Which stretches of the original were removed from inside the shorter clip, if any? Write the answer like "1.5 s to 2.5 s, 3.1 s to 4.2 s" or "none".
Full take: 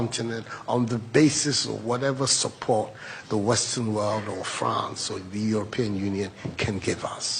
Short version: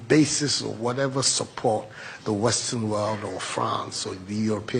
none